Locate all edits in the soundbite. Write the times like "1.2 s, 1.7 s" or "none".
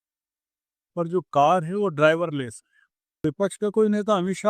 3.2 s

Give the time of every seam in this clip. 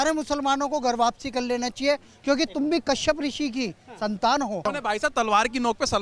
4.6 s

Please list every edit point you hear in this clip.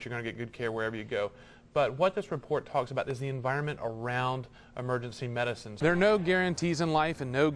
5.7 s

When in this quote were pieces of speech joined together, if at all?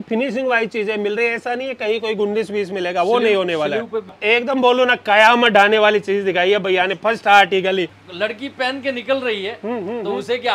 4.2 s, 8.0 s

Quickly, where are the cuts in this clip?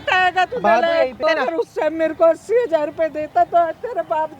1.2 s

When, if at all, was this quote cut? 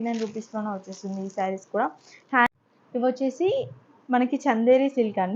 2.5 s

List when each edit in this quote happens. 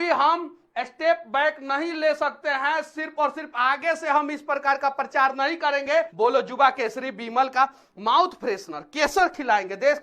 6.1 s

